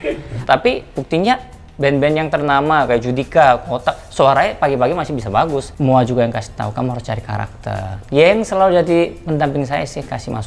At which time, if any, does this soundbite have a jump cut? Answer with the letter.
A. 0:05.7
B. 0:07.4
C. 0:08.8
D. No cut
A